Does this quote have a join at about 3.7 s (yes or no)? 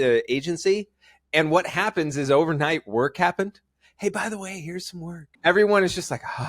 no